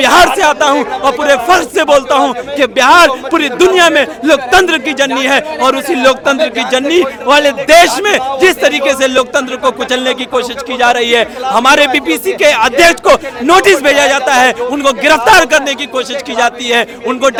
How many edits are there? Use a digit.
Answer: 0